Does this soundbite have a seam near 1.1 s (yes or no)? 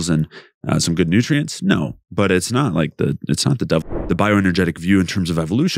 no